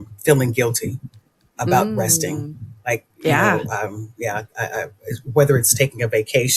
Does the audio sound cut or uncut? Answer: uncut